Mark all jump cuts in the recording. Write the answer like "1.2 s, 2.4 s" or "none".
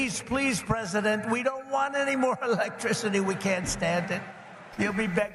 none